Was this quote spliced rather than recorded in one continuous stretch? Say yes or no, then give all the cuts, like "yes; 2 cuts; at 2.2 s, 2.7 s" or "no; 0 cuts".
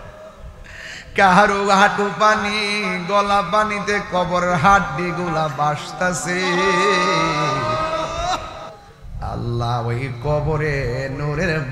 no; 0 cuts